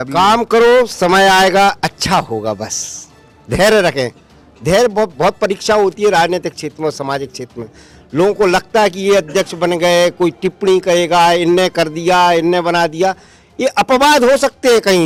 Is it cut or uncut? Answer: uncut